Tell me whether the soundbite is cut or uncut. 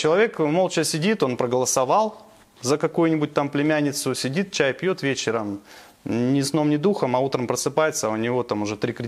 uncut